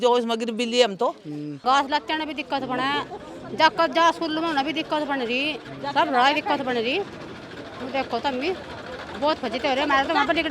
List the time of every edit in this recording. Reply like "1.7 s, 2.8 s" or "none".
1.6 s